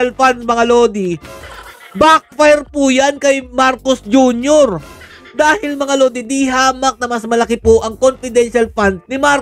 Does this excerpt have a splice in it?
no; 0 cuts

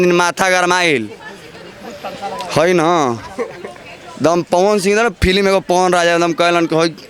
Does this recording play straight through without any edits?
yes; 0 cuts

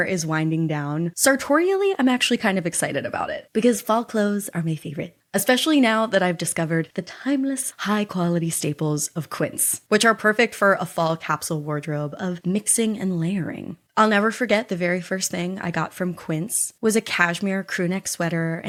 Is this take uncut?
yes; 0 cuts

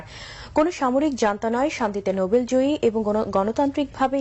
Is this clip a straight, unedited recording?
no; 1 cut; at 3.3 s

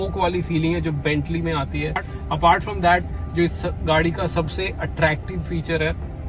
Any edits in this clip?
no; 0 cuts

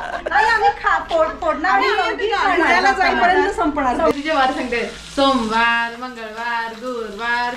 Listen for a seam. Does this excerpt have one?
yes; 1 cut; at 4.1 s

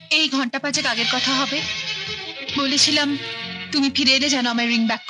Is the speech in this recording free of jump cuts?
yes; 0 cuts

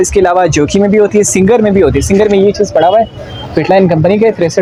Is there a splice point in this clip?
no; 0 cuts

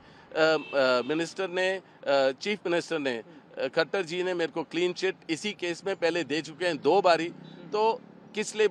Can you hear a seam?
no; 0 cuts

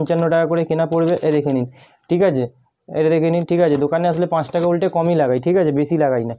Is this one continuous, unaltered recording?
yes; 0 cuts

